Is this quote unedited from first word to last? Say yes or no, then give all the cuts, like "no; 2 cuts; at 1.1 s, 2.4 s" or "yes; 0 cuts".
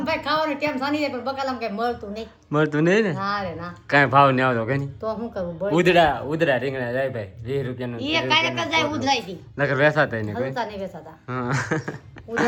yes; 0 cuts